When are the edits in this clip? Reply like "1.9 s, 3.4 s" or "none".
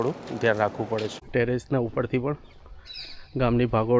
1.2 s